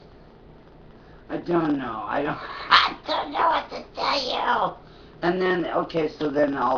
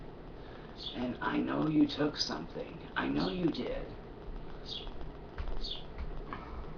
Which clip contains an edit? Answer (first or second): first